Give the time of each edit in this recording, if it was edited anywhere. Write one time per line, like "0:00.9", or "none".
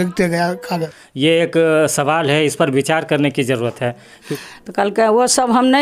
0:01.0
0:04.2